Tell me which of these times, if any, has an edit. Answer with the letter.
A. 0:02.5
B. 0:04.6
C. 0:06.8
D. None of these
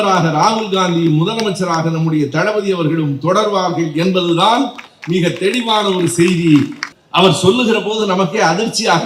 C